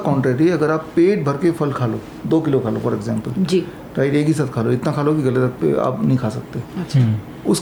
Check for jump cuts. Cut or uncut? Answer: uncut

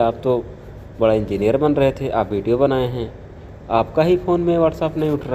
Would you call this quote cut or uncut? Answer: uncut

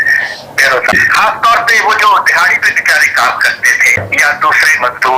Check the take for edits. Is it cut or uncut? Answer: cut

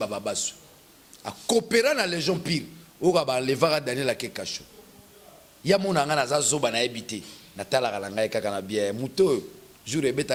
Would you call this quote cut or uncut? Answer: uncut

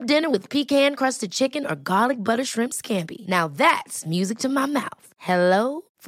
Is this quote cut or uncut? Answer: uncut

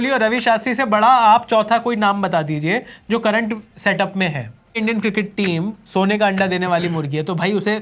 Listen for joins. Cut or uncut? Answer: cut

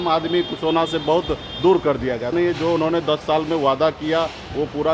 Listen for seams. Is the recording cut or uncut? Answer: cut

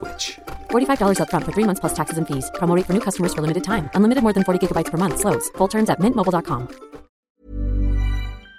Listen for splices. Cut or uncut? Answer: cut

